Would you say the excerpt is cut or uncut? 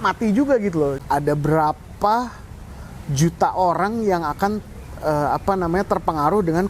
cut